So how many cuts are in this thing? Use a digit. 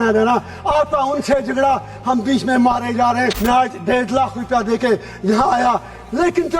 1